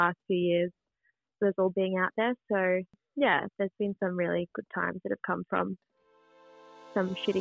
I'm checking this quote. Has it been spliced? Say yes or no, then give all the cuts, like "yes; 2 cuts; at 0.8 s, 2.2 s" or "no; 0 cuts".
yes; 1 cut; at 3.0 s